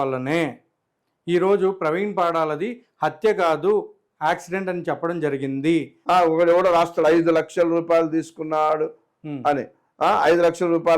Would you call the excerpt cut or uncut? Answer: cut